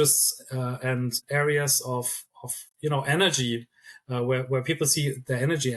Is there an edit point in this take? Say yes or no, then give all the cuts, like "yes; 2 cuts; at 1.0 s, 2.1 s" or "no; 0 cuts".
yes; 1 cut; at 1.2 s